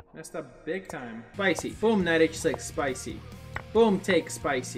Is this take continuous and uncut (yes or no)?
no